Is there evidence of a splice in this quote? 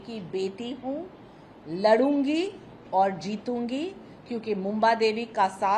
no; 0 cuts

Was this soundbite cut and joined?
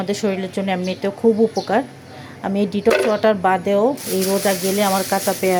no; 0 cuts

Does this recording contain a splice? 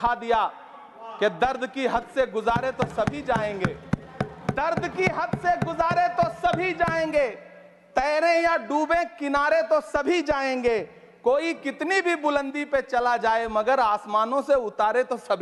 no; 0 cuts

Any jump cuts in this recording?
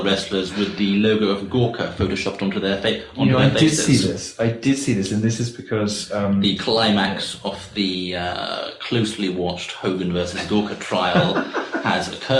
no; 0 cuts

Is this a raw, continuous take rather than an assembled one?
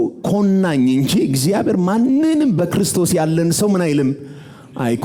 yes; 0 cuts

